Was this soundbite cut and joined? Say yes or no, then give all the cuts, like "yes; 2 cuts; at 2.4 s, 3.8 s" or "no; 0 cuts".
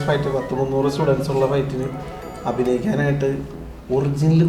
no; 0 cuts